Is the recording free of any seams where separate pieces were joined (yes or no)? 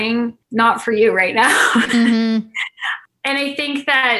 yes